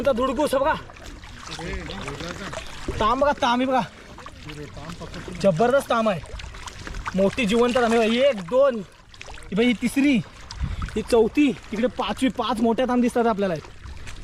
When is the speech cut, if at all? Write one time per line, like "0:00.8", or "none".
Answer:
none